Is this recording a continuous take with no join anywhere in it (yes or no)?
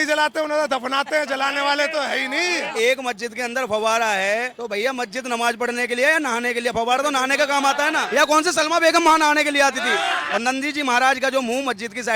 no